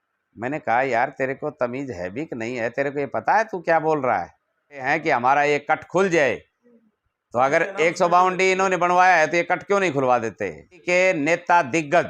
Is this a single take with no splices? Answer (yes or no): no